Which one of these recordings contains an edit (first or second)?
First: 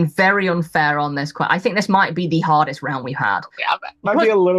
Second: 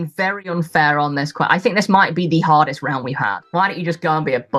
second